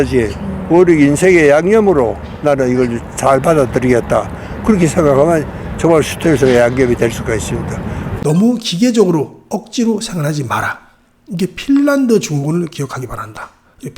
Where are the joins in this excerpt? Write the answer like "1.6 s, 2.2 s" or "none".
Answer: 8.1 s